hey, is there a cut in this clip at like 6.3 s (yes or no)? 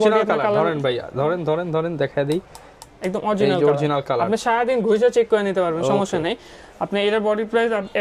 no